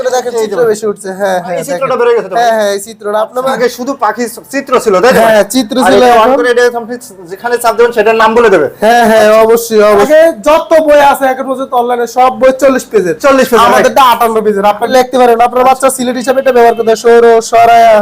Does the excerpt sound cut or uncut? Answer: cut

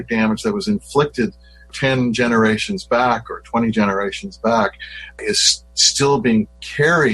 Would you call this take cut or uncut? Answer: uncut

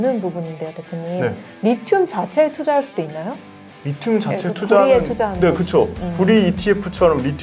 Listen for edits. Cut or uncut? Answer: uncut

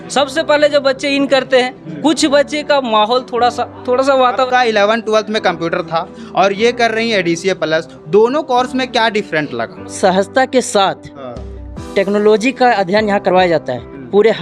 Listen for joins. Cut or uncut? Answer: cut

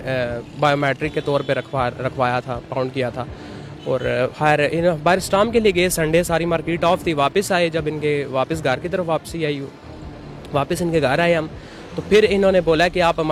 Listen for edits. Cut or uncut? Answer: uncut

